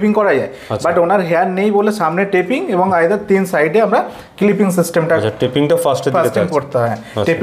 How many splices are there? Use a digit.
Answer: 0